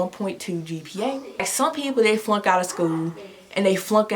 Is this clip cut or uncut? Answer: cut